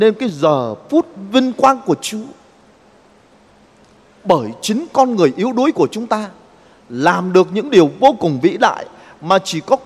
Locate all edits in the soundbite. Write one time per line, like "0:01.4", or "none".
none